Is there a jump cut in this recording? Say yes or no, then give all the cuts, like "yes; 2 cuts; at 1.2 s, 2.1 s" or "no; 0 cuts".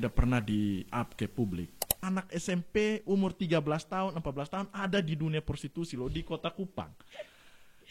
yes; 1 cut; at 1.9 s